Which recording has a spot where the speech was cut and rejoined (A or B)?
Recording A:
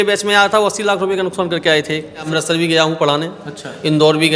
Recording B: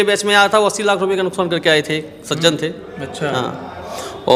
A